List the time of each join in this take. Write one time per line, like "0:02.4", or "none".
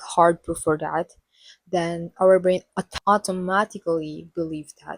0:02.9